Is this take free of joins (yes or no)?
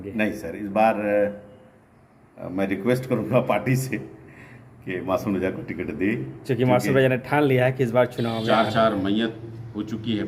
no